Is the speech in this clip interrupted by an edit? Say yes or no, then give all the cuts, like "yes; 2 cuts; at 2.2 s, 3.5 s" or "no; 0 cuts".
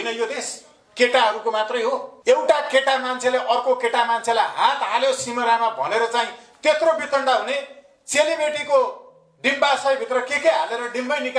yes; 1 cut; at 2.1 s